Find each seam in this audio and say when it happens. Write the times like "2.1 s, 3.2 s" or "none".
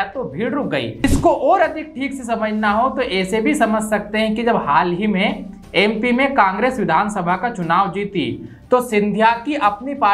1.0 s